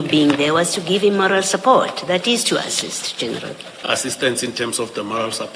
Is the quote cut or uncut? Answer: cut